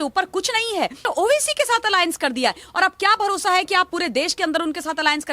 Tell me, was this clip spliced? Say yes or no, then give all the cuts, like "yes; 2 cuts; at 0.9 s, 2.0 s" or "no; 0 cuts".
yes; 1 cut; at 1.0 s